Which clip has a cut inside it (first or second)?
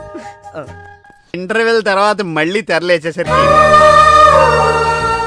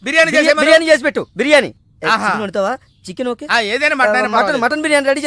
first